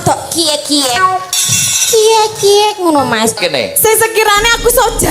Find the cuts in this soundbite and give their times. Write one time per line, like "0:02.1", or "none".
0:03.4